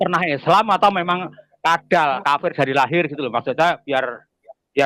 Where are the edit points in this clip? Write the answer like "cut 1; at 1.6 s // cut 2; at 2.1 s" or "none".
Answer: none